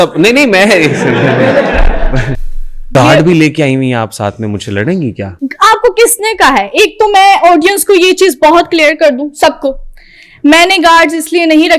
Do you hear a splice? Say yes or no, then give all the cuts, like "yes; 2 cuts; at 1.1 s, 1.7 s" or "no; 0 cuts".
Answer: yes; 2 cuts; at 2.8 s, 5.3 s